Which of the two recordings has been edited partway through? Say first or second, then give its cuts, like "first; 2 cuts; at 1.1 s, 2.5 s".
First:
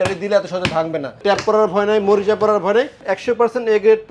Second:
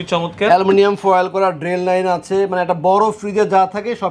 first; 2 cuts; at 1.2 s, 3.1 s